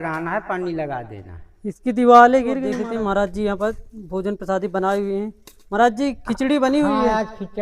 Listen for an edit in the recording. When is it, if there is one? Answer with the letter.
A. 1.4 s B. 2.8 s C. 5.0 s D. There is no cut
B